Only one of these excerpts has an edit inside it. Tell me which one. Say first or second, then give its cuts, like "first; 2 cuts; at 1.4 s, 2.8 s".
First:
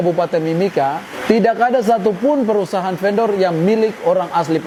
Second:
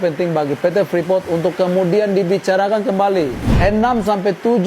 second; 1 cut; at 3.5 s